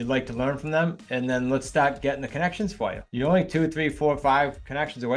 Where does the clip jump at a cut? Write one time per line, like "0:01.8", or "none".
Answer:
0:01.0
0:03.0